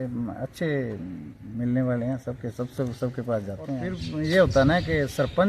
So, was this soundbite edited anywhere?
yes; 1 cut; at 3.9 s

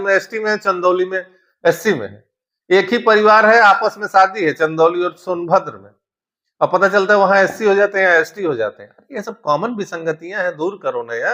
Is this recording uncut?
yes; 0 cuts

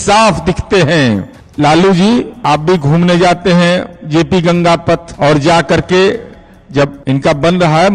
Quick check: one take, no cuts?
no; 4 cuts; at 1.4 s, 2.3 s, 5.1 s, 7.0 s

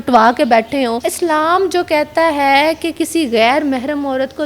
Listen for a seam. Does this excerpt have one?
yes; 1 cut; at 1.0 s

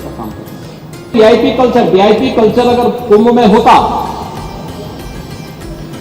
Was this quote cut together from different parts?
yes; 1 cut; at 1.1 s

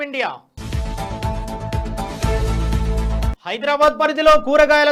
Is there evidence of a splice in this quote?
no; 0 cuts

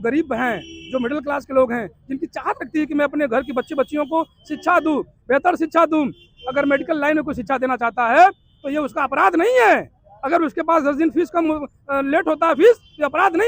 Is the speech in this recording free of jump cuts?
yes; 0 cuts

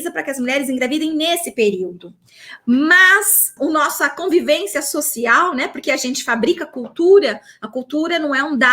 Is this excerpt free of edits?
no; 1 cut; at 3.5 s

